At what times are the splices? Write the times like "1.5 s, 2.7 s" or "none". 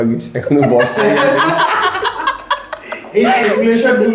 none